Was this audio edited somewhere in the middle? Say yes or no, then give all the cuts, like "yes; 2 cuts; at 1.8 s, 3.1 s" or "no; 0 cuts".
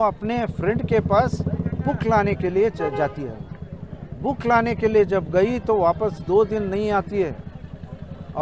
no; 0 cuts